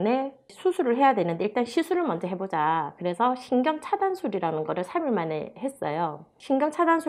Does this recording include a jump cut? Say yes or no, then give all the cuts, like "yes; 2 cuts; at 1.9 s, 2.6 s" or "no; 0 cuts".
no; 0 cuts